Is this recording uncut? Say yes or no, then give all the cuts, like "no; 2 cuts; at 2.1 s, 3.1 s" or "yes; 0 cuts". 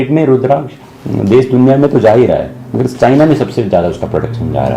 yes; 0 cuts